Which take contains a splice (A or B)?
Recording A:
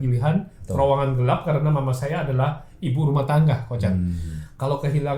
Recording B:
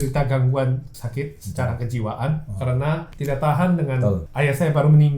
B